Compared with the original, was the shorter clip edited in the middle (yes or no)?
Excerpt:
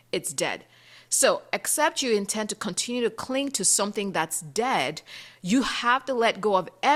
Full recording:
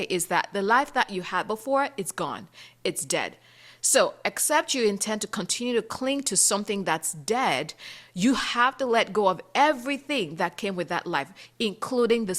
no